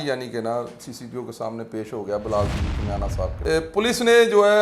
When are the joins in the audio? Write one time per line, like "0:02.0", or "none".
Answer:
0:03.4